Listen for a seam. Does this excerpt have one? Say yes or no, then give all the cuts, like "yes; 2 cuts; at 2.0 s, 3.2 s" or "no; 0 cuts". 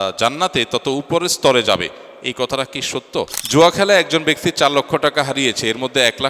yes; 1 cut; at 3.4 s